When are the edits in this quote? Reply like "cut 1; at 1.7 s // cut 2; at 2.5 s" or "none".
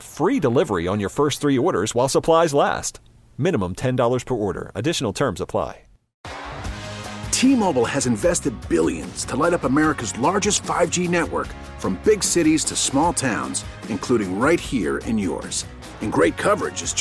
cut 1; at 6.1 s